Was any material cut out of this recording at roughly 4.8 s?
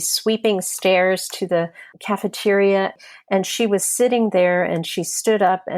no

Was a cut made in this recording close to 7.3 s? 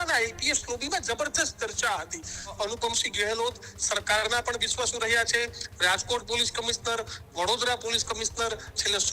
no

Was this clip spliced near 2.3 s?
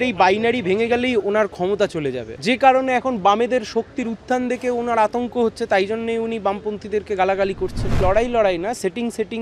yes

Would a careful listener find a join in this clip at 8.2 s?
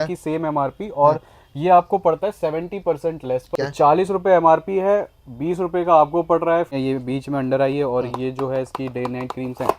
no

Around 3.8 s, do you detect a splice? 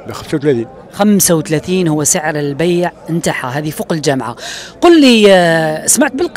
no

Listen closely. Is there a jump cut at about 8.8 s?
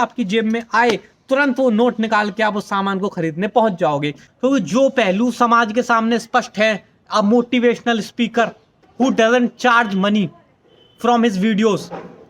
yes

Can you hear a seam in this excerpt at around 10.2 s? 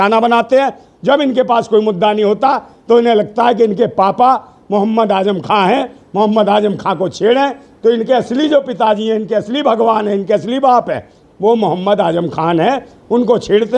no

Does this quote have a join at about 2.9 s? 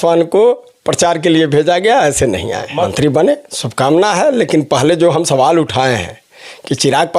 yes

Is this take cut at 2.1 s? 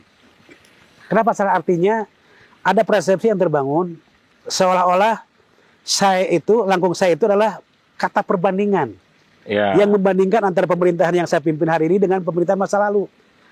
no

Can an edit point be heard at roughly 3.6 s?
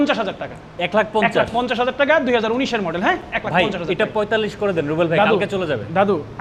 no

